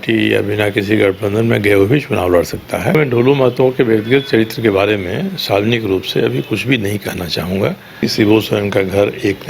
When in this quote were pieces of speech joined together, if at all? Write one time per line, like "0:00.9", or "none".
0:02.9
0:08.0